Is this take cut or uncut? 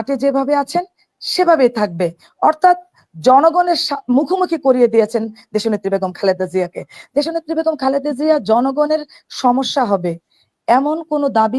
uncut